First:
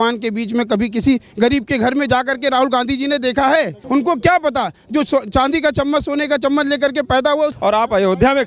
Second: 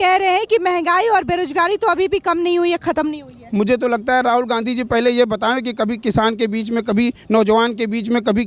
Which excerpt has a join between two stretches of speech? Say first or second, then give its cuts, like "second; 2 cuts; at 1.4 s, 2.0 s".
first; 2 cuts; at 3.8 s, 7.6 s